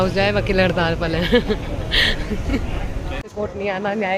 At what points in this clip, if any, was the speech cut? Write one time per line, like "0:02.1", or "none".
none

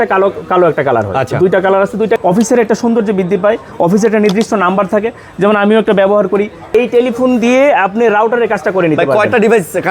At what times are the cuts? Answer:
0:02.2
0:06.7

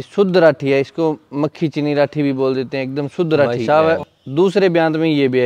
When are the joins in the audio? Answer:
0:03.6

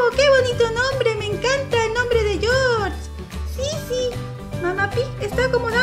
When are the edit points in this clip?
none

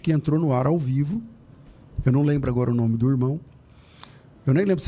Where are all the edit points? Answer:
none

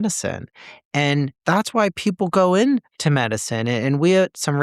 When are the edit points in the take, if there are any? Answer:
0:02.9

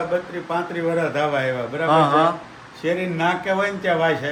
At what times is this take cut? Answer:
none

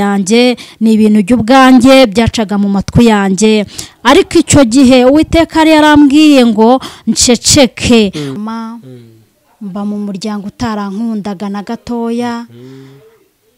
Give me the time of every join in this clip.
0:08.3

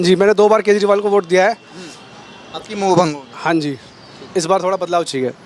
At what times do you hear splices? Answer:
none

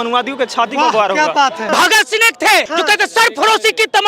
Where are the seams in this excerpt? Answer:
0:01.7
0:02.7

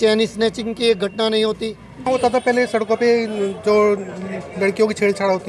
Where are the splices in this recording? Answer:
0:02.1

